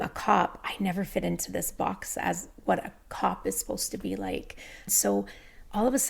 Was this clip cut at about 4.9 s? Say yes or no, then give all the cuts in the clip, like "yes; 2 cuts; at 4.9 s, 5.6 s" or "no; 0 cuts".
yes; 1 cut; at 4.9 s